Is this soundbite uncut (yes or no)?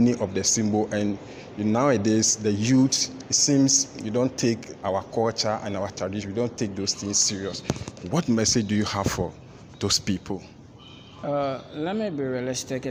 yes